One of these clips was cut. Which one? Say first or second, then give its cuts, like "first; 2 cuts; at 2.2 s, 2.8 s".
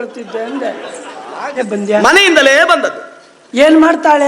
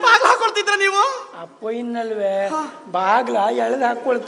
first; 1 cut; at 1.6 s